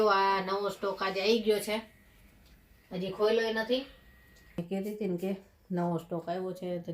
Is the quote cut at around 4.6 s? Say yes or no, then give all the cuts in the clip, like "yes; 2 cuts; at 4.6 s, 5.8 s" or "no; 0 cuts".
yes; 1 cut; at 4.6 s